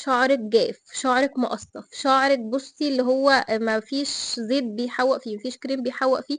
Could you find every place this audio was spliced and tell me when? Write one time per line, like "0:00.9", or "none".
none